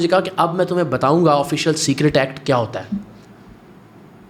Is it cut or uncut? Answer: uncut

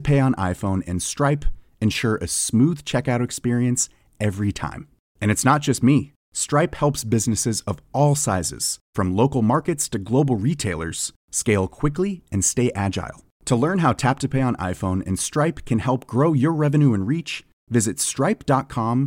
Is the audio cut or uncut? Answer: uncut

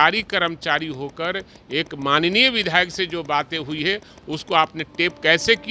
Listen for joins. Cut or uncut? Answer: uncut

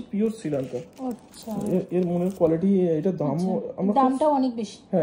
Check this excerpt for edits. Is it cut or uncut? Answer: uncut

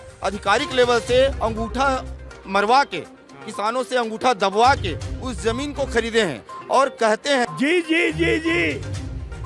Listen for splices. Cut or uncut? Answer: cut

